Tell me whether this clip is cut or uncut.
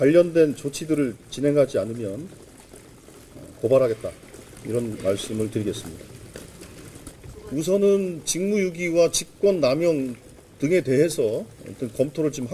cut